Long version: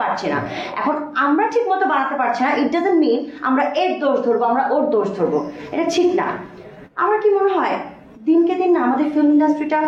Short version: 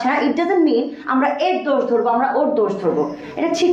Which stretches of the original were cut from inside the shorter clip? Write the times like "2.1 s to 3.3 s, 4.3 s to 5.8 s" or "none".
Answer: none